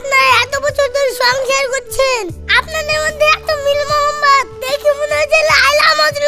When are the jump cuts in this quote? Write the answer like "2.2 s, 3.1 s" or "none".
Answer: none